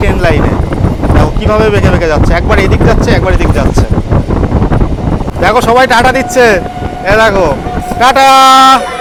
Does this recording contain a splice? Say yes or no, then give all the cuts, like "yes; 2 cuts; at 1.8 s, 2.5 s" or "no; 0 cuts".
no; 0 cuts